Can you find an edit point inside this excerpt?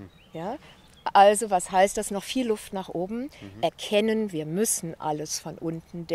yes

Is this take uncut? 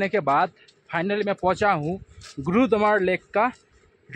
yes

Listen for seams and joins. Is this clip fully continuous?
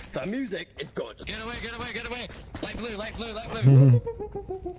no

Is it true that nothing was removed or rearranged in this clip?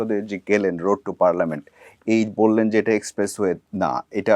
yes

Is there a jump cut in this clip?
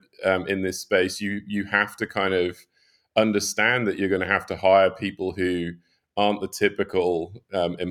no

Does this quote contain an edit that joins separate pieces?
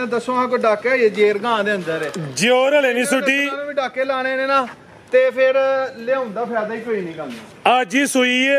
no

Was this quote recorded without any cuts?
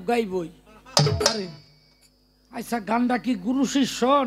yes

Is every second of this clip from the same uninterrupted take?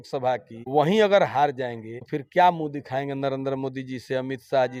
yes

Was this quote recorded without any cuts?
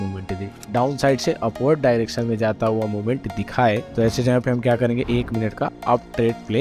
yes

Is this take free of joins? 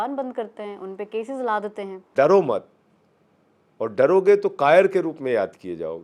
no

